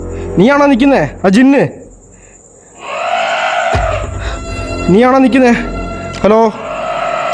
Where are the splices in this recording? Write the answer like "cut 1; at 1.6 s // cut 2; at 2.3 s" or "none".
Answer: none